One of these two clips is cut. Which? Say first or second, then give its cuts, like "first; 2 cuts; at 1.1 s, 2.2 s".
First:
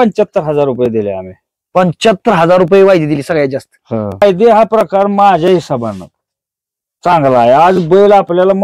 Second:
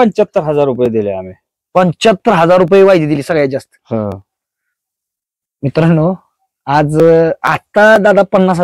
first; 1 cut; at 4.2 s